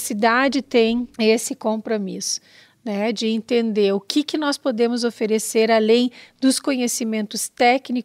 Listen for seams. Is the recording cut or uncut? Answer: cut